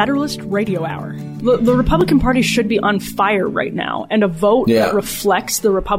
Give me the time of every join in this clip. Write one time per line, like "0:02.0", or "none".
0:01.4